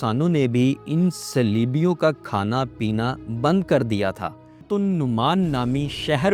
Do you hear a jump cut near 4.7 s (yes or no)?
yes